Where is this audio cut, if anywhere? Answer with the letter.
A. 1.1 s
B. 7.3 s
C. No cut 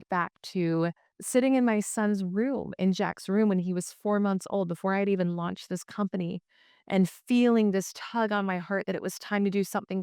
A